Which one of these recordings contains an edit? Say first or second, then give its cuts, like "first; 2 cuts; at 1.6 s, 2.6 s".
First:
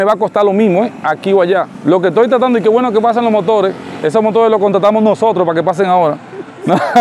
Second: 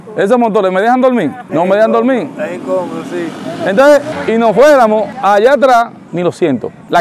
second; 3 cuts; at 1.4 s, 4.1 s, 6.1 s